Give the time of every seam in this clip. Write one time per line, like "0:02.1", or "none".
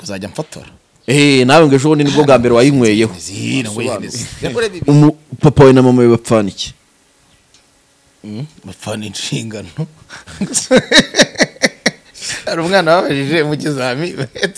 0:04.2